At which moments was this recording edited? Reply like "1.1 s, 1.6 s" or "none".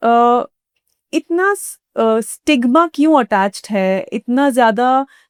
none